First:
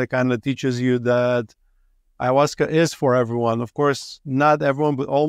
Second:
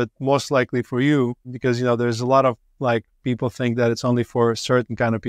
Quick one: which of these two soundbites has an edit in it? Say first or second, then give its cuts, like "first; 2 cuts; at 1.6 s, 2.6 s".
second; 1 cut; at 1.5 s